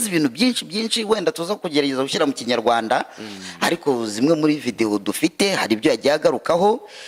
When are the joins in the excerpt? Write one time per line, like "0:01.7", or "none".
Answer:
none